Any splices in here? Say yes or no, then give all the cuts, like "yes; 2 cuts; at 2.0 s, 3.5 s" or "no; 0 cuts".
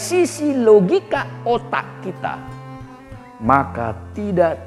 no; 0 cuts